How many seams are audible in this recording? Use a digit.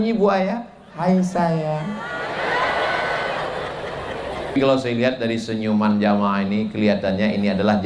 1